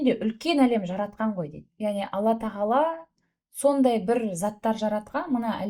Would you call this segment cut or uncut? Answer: cut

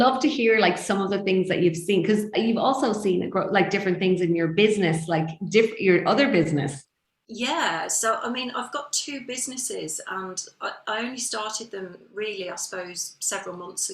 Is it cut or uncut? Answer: uncut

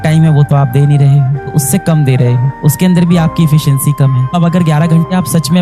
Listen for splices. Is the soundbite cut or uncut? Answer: cut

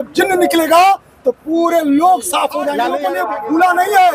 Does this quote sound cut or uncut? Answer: cut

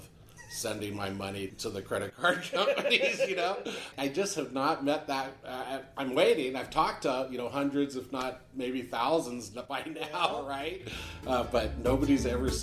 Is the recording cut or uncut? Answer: uncut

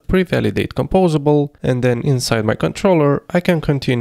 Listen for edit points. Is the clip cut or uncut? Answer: cut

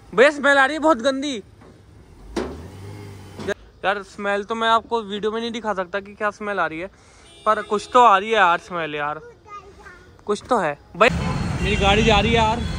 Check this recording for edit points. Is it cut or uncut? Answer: cut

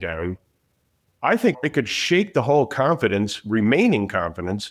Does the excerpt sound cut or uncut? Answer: cut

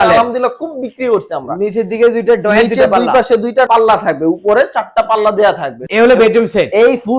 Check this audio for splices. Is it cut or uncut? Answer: uncut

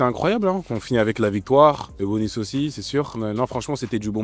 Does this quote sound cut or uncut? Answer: cut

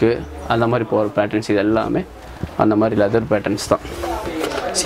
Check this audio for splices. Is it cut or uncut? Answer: uncut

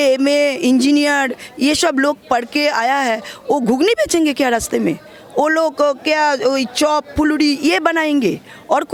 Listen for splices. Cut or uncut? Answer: uncut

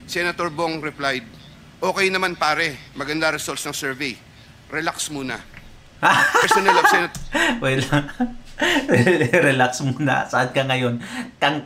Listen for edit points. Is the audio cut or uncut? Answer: uncut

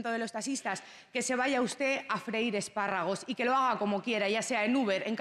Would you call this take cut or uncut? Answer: uncut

